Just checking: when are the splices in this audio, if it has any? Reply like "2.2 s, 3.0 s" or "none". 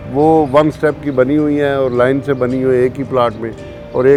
none